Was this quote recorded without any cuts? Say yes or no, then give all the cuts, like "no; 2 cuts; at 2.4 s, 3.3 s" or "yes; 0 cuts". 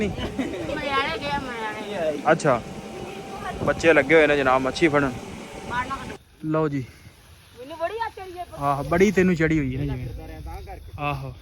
no; 1 cut; at 6.1 s